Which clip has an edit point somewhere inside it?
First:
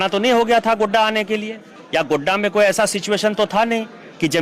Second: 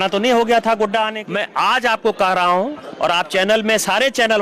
second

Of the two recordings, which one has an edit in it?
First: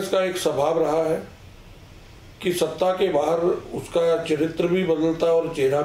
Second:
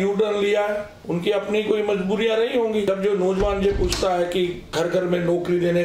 second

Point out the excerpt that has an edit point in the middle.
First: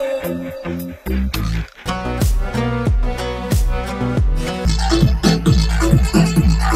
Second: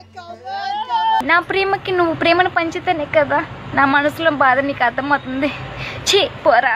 first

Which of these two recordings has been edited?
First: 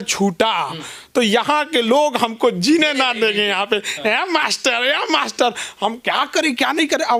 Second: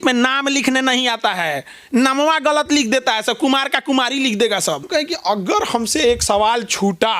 second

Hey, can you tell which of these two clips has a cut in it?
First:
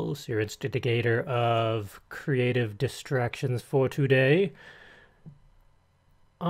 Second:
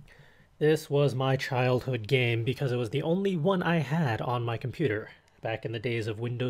first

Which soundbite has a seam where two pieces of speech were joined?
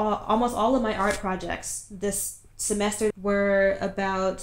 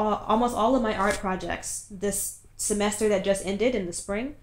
first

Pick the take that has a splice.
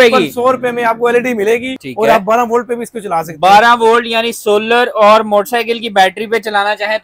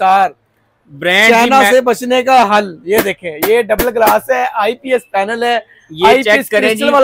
first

